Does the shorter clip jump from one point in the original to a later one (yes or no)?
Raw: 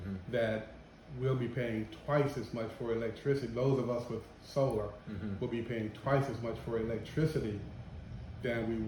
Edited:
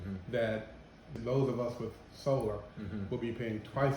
yes